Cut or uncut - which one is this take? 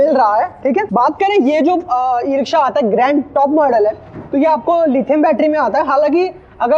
uncut